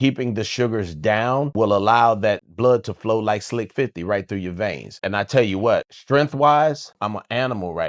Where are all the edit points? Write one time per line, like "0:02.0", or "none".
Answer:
0:01.5
0:02.5
0:04.9
0:05.9
0:06.9

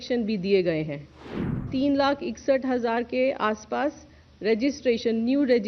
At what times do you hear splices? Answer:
0:01.7

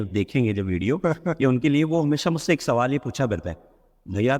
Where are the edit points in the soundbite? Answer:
0:01.5

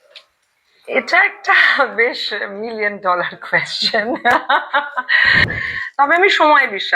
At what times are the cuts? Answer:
0:05.7

